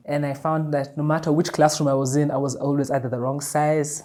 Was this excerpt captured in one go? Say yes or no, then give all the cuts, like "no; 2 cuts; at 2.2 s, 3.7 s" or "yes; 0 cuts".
yes; 0 cuts